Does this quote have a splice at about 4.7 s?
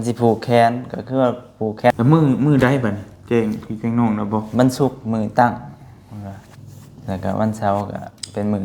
no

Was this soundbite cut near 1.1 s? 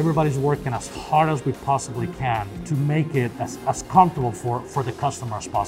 no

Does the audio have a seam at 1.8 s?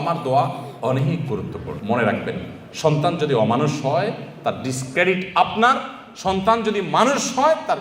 yes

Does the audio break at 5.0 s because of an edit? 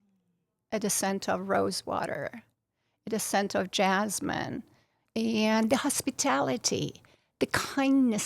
yes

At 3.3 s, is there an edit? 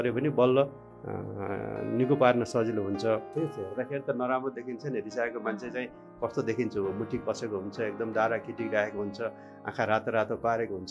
yes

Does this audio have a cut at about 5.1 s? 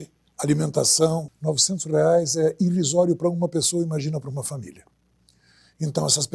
no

